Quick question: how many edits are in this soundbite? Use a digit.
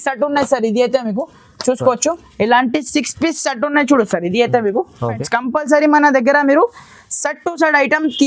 1